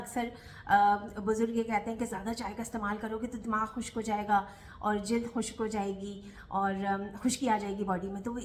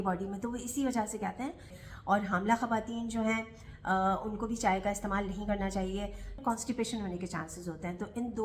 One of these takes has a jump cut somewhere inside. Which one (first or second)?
second